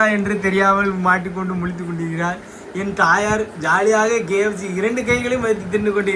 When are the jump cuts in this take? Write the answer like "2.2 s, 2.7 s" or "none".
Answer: none